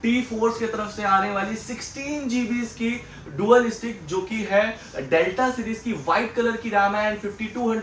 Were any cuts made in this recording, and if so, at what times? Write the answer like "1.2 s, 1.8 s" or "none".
none

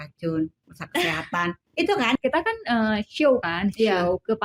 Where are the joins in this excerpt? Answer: 2.2 s

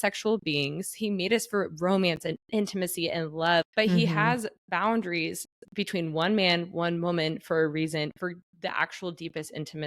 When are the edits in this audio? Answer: 0.9 s, 3.7 s

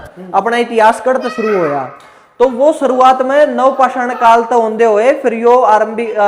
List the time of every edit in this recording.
none

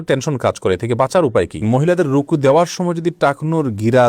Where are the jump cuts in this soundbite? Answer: 1.6 s

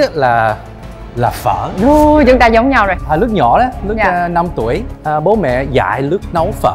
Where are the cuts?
none

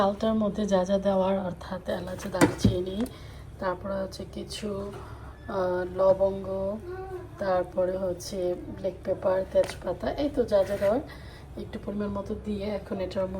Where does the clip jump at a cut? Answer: none

